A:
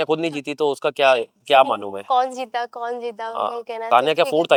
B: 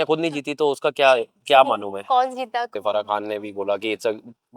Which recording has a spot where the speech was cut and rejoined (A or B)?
B